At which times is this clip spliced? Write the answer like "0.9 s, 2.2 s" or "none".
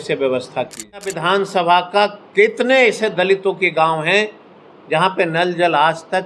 1.1 s